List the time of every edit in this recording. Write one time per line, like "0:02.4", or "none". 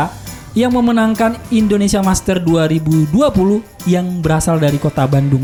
none